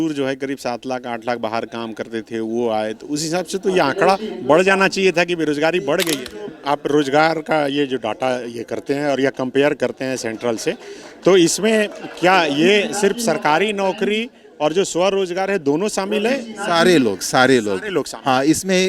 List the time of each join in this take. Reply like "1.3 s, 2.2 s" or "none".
6.2 s